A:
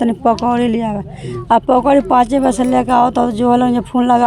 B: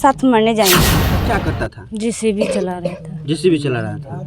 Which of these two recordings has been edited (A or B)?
B